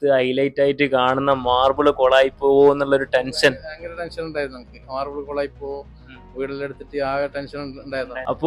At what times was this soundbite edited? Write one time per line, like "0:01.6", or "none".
none